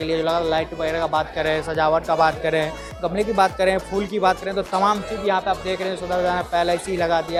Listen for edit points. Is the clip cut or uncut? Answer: uncut